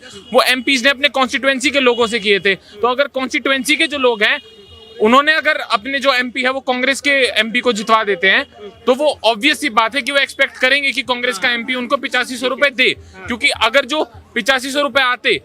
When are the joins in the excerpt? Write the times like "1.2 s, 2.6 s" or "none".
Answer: none